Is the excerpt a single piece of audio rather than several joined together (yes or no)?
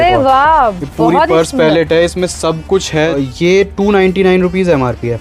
no